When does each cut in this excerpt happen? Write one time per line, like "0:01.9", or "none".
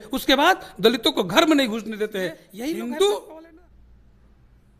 0:02.4